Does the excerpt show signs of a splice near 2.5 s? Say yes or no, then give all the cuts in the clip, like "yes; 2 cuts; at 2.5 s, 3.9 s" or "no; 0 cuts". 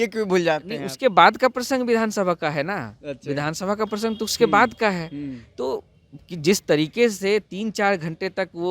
no; 0 cuts